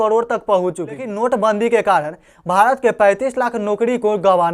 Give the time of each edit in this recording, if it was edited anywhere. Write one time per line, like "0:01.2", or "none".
0:01.1